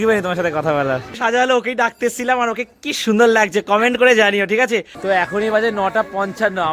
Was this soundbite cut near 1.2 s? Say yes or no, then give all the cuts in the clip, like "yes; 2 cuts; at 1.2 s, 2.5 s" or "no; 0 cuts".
yes; 2 cuts; at 1.2 s, 4.9 s